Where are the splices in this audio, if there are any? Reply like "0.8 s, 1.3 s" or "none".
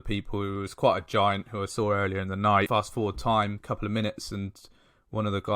2.7 s, 3.6 s